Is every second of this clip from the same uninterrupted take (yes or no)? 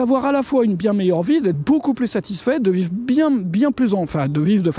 yes